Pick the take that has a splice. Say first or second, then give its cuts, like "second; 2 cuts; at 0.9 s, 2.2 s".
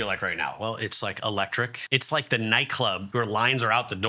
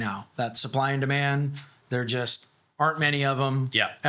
first; 2 cuts; at 1.8 s, 3.0 s